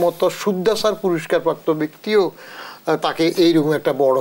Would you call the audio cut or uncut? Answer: uncut